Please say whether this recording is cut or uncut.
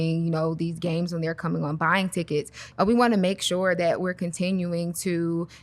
cut